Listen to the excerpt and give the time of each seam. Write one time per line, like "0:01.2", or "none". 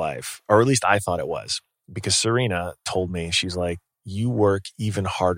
none

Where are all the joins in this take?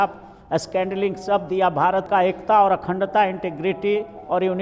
0:02.1

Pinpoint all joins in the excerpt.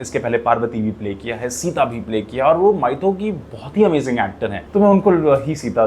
0:04.6

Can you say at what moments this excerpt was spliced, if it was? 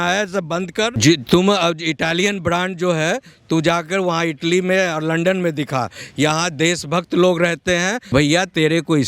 0:08.0

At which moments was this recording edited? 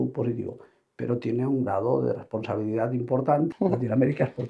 0:03.5

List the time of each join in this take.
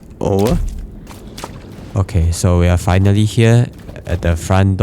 0:01.1

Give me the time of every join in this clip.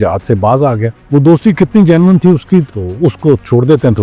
0:00.9
0:02.7

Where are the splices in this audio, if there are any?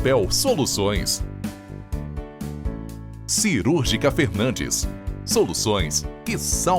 0:01.3
0:03.4

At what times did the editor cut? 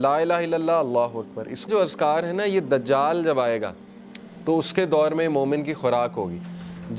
0:01.7

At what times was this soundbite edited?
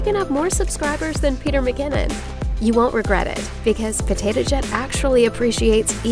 none

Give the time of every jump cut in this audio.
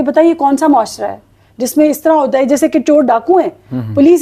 none

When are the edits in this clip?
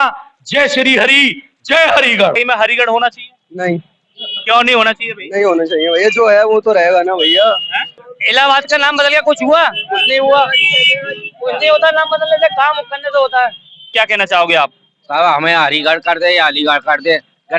0:02.3
0:07.9
0:13.8

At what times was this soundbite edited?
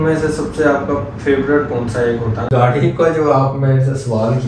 0:02.4

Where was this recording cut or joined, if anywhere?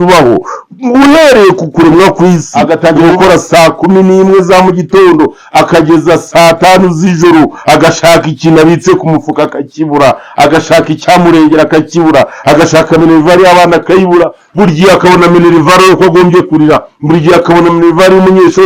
0:02.5

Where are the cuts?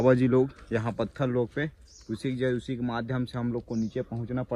none

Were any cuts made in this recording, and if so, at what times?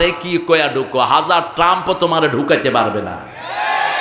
none

